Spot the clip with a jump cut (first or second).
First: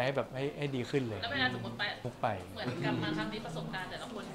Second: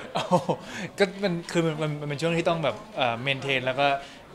first